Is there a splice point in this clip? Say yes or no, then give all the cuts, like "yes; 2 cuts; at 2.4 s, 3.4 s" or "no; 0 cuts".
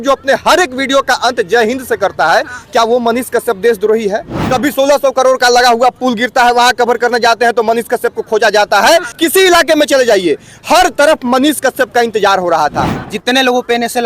yes; 3 cuts; at 4.4 s, 9.2 s, 13.0 s